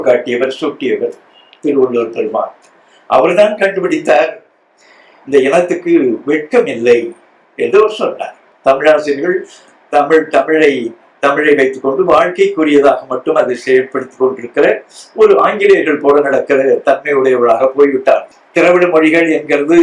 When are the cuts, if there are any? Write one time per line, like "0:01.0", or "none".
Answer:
0:08.4
0:18.3

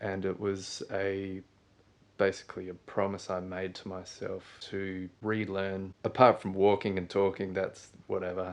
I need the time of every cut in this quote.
0:04.5
0:05.9

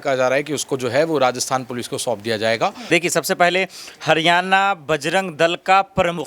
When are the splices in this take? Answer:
0:02.9

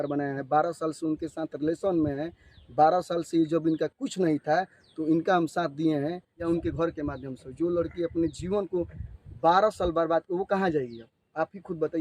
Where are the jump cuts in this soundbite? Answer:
0:06.4

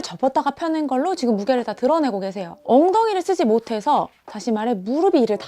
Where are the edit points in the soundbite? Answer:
none

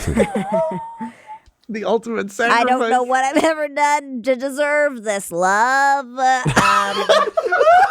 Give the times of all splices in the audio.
0:02.5

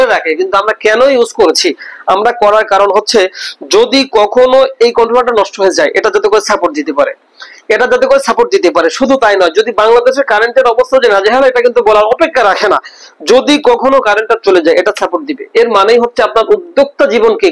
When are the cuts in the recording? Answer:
none

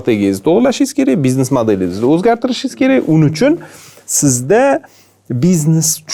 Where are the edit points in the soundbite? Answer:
none

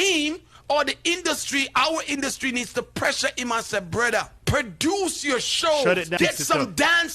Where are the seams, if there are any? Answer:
0:04.4
0:06.1

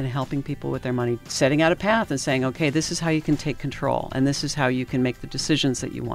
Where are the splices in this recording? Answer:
0:01.2

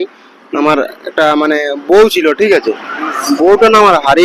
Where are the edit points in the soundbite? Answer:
none

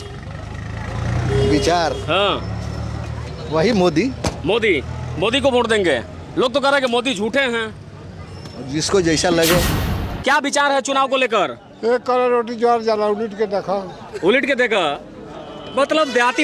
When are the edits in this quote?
0:09.8

